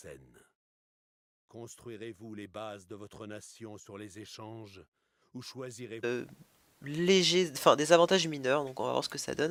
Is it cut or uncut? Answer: uncut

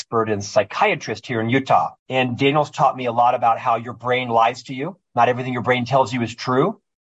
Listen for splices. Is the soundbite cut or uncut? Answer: cut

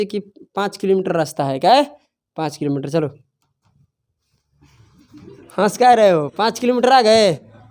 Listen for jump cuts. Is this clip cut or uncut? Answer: uncut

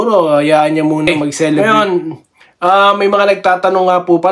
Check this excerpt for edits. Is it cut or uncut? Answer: cut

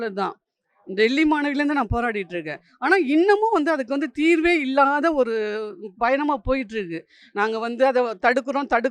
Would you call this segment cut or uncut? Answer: uncut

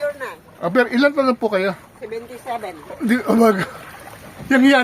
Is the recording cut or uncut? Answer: uncut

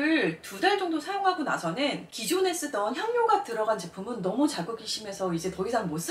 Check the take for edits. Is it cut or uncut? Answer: uncut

